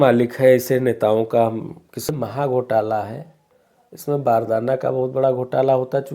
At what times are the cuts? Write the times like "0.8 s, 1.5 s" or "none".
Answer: 2.1 s

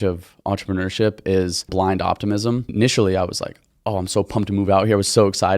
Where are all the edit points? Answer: 1.7 s, 2.7 s

